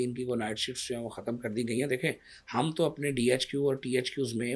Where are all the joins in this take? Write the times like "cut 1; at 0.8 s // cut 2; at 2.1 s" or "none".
none